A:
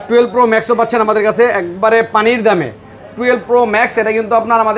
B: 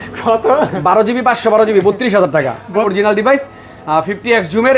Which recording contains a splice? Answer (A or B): B